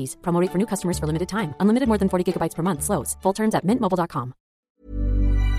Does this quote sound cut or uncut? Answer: cut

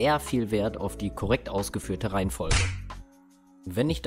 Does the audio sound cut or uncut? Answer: uncut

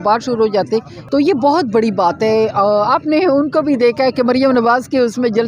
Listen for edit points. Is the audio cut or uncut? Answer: cut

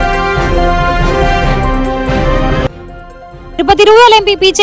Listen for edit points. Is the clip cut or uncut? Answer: cut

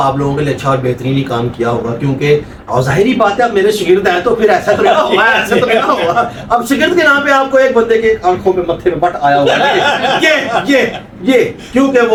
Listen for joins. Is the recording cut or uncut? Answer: uncut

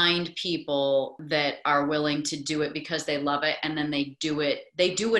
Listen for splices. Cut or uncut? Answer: cut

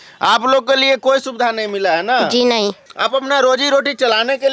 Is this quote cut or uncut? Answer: cut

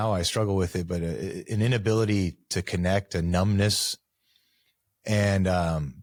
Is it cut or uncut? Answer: uncut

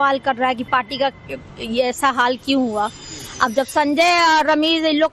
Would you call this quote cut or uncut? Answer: cut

